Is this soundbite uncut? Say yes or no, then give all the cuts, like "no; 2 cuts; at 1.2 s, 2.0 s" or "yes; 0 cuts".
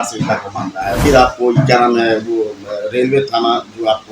no; 1 cut; at 1.0 s